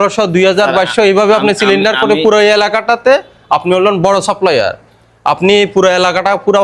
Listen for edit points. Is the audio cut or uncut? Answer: uncut